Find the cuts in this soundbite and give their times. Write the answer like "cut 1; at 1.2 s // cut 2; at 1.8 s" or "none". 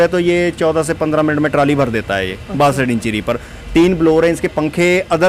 none